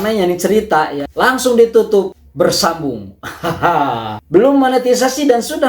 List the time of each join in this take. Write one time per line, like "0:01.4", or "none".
0:04.2